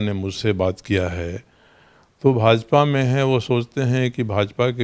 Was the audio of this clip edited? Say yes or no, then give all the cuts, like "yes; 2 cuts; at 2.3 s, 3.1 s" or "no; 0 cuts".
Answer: no; 0 cuts